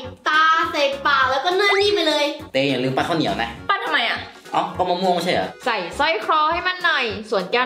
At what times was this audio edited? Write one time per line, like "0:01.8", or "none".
0:02.4
0:05.5